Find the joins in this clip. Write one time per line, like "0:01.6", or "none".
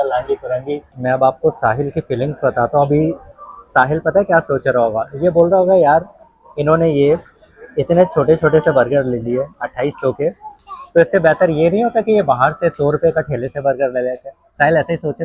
0:01.0